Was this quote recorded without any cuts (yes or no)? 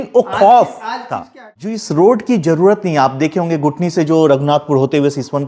no